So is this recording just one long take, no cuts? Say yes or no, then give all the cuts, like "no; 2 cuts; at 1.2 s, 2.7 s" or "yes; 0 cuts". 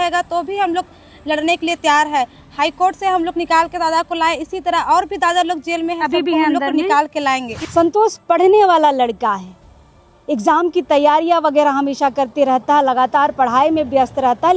no; 1 cut; at 7.6 s